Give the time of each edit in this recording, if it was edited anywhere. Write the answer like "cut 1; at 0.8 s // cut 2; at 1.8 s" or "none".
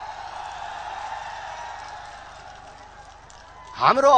none